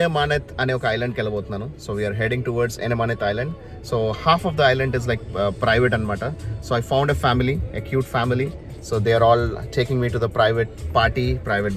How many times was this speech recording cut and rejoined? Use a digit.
0